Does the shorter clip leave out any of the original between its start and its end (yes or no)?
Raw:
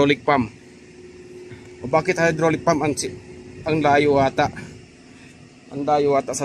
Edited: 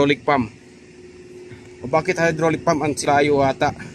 yes